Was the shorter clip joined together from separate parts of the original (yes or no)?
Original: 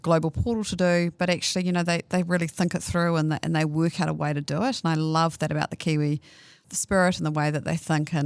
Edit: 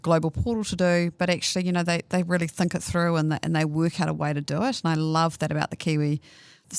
no